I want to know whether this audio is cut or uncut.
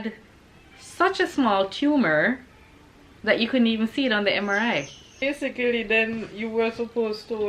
cut